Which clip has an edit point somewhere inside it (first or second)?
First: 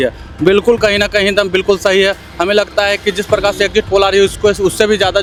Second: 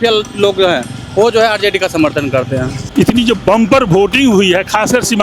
second